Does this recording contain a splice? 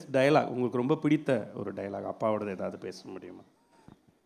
no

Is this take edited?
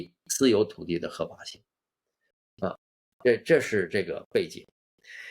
no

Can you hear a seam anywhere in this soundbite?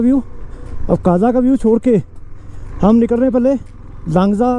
no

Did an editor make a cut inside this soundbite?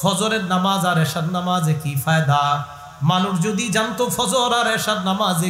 no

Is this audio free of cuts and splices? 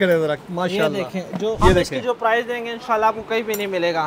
no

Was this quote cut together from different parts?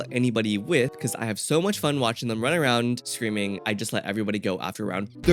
yes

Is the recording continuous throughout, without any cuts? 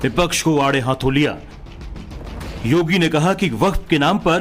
yes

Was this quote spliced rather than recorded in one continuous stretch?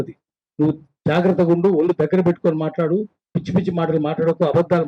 no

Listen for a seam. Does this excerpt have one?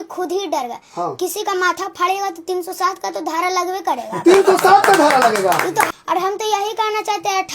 yes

